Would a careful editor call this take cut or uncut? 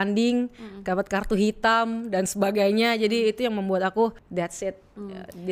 cut